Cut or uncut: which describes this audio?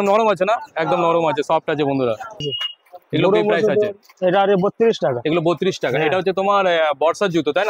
cut